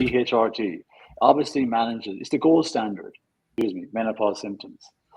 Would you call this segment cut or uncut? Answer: cut